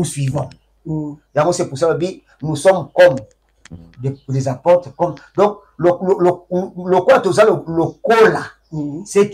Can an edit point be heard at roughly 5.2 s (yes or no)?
no